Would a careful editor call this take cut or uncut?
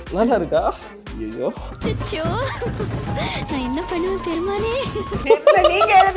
uncut